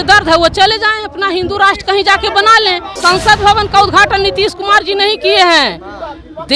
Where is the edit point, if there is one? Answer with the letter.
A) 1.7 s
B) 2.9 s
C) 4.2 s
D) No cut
B